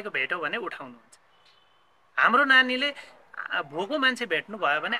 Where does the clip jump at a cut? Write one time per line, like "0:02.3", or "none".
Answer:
none